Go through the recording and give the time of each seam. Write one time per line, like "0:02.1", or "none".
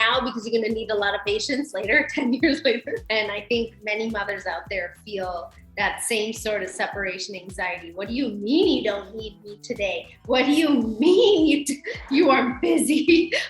0:03.0